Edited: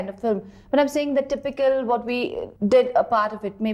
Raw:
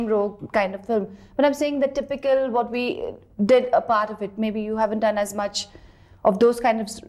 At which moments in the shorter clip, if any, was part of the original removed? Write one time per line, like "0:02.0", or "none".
0:02.5